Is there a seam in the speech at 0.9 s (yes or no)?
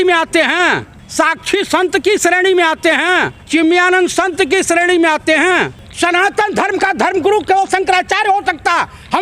yes